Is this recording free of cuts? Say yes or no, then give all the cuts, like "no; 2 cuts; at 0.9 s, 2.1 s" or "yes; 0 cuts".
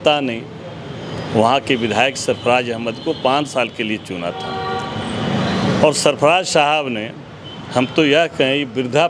yes; 0 cuts